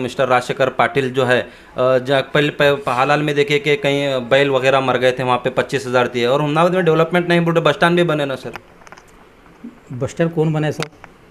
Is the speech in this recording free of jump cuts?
yes; 0 cuts

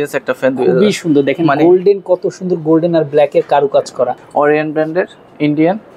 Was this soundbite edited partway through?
yes; 1 cut; at 4.2 s

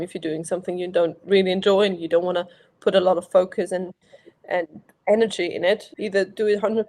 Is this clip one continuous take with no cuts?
no; 1 cut; at 5.9 s

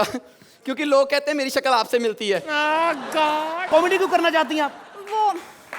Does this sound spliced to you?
yes; 1 cut; at 3.6 s

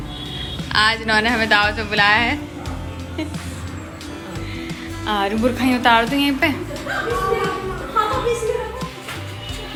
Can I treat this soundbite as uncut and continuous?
yes; 0 cuts

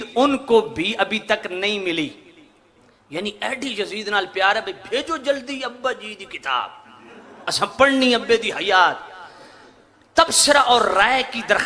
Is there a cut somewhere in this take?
no; 0 cuts

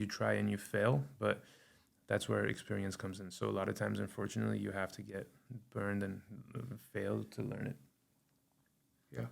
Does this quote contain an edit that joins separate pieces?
no; 0 cuts

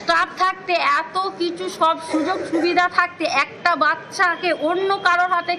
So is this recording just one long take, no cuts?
yes; 0 cuts

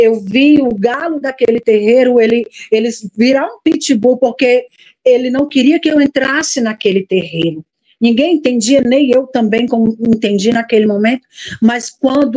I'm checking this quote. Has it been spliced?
no; 0 cuts

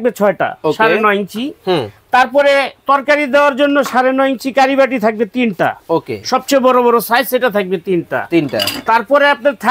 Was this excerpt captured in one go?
yes; 0 cuts

